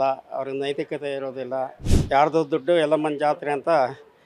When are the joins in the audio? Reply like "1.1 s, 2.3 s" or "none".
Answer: 1.9 s